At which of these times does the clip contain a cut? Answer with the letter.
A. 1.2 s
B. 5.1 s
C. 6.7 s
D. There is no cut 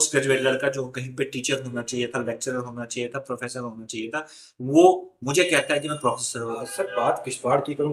C